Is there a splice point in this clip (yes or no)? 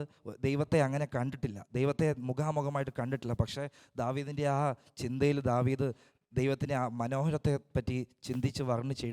no